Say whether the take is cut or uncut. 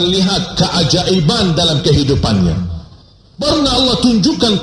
cut